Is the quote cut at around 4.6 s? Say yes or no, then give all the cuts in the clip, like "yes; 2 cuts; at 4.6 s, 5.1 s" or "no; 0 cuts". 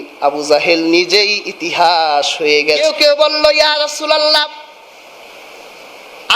no; 1 cut; at 2.8 s